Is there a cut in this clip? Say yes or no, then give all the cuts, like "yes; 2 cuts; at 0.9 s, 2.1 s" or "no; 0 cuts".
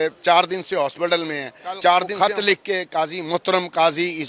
yes; 1 cut; at 2.1 s